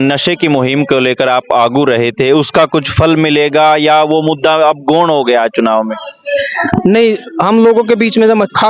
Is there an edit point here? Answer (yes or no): no